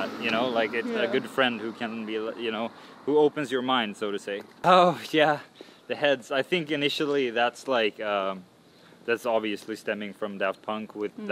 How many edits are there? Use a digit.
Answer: 1